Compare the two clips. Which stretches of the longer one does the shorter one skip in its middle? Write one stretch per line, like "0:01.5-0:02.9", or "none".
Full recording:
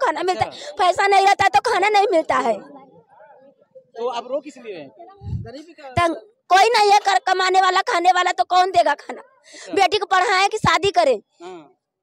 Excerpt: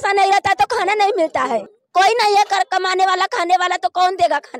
0:02.7-0:06.3